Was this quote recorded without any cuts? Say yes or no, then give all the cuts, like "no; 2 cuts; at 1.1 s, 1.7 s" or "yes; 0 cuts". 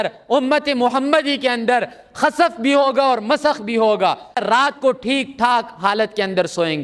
no; 1 cut; at 4.4 s